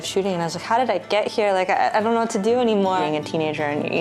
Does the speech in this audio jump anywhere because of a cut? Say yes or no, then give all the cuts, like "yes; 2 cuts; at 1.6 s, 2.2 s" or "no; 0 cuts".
yes; 1 cut; at 3.0 s